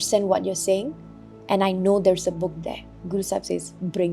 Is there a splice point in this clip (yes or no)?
yes